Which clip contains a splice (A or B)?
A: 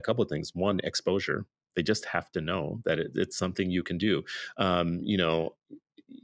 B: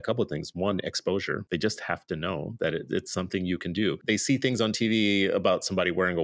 B